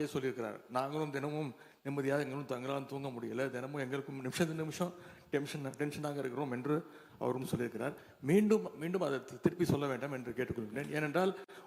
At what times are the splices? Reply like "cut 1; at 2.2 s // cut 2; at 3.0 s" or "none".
none